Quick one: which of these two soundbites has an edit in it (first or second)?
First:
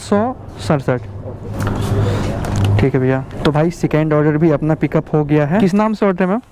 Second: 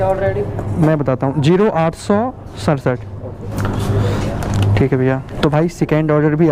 first